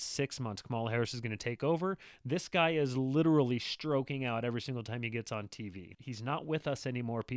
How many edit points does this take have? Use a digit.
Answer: 1